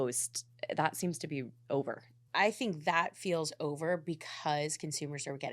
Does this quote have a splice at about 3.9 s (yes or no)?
no